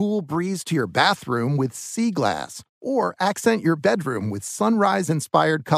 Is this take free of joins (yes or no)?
yes